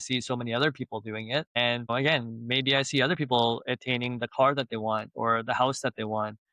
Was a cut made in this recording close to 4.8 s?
no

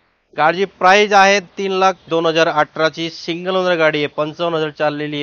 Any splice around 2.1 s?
yes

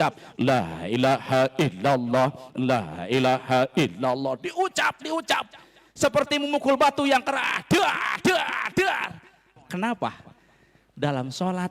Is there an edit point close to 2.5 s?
no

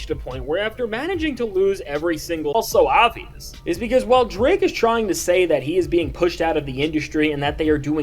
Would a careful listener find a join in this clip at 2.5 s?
yes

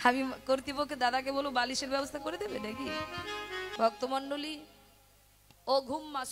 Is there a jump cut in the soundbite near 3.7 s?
yes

